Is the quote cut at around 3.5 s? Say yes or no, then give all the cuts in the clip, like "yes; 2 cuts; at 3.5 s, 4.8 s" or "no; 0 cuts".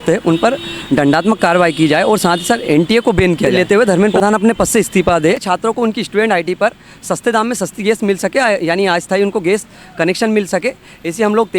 yes; 2 cuts; at 3.5 s, 5.4 s